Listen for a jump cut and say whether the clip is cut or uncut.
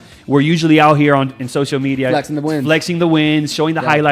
uncut